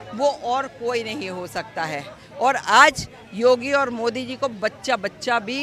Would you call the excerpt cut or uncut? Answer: uncut